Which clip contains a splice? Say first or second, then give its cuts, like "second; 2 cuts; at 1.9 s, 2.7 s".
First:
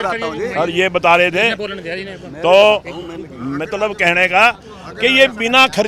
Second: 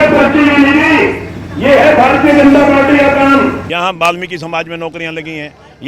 second; 1 cut; at 3.6 s